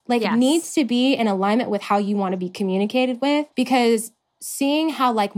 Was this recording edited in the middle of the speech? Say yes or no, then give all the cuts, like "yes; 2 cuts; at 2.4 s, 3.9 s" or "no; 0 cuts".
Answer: yes; 1 cut; at 3.5 s